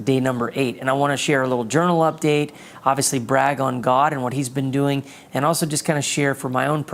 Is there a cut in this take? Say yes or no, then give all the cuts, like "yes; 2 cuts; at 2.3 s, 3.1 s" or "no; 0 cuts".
no; 0 cuts